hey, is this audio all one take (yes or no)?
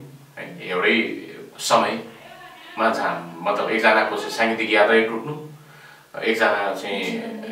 yes